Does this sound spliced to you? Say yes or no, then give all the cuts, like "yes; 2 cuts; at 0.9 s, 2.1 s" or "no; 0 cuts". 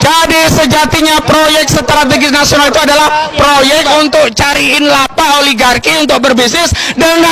no; 0 cuts